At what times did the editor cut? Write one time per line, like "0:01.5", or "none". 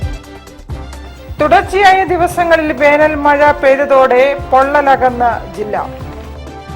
0:00.9